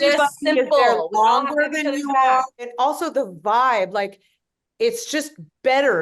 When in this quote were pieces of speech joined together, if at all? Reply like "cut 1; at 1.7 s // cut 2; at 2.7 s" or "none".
cut 1; at 2.7 s